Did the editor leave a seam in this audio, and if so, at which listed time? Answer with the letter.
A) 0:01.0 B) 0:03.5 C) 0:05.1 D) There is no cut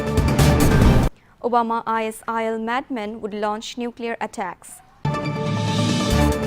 A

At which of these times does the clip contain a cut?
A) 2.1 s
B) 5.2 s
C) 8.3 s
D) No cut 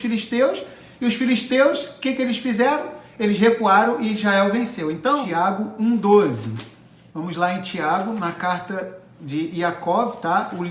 B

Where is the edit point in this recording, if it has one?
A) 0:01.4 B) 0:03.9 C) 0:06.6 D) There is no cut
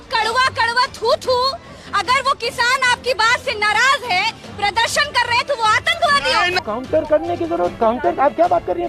C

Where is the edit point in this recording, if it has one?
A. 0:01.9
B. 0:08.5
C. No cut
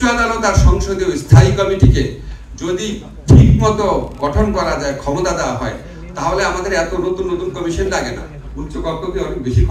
B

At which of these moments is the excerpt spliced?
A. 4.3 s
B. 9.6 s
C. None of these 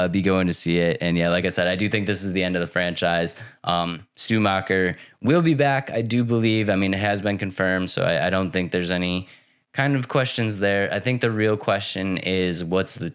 C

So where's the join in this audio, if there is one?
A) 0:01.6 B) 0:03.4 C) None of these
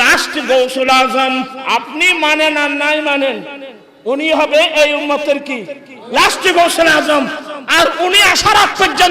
A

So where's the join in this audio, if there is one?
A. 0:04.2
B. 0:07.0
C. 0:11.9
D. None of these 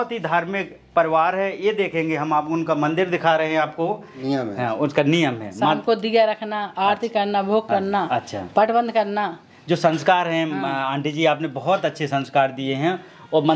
A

